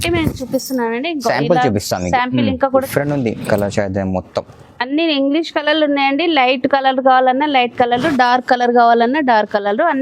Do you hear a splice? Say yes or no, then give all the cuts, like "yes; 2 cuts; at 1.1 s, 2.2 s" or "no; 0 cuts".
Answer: yes; 1 cut; at 2.7 s